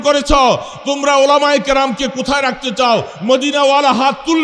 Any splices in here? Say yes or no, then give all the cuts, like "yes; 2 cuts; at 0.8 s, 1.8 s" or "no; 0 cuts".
no; 0 cuts